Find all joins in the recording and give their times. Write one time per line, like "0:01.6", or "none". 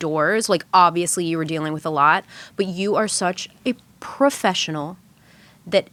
none

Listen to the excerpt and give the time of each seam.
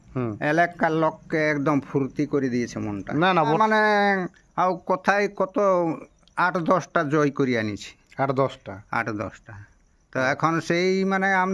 0:03.6

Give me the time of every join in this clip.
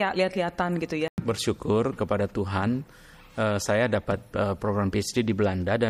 0:01.1

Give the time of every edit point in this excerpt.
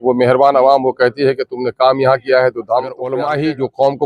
0:03.2

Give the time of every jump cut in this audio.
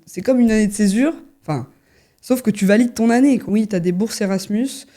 0:03.5

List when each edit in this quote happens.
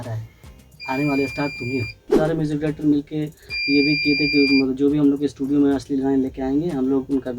0:02.1

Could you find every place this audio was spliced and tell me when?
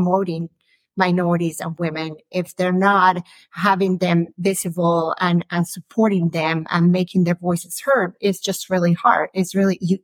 none

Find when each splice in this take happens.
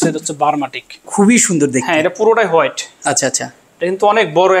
0:01.0

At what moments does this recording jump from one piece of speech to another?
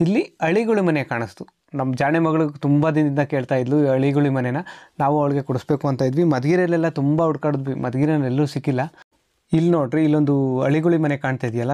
none

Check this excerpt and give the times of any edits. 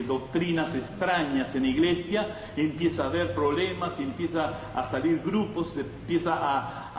none

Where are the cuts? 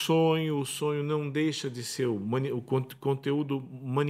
none

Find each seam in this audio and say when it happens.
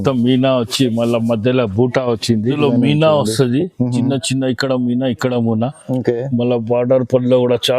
0:02.6

